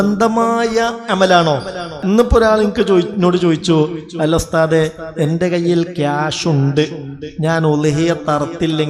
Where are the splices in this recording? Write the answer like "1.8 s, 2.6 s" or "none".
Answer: 1.9 s